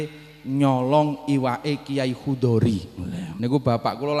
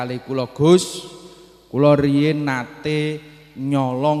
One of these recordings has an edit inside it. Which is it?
first; 1 cut; at 3.3 s

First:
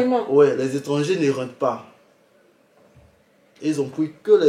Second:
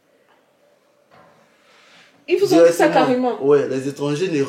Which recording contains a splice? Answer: second; 1 cut; at 2.2 s

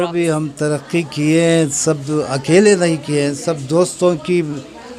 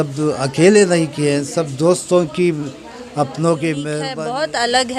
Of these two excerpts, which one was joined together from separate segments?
second; 1 cut; at 4.0 s

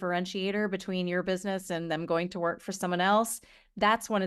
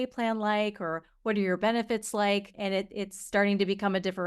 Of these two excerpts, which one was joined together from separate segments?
second; 1 cut; at 2.5 s

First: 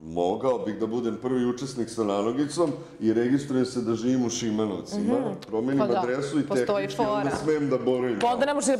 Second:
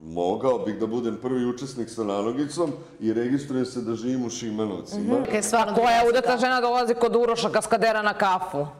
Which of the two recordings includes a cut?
second; 1 cut; at 5.3 s

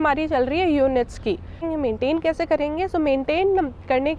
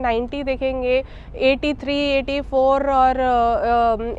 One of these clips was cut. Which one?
first; 1 cut; at 1.7 s

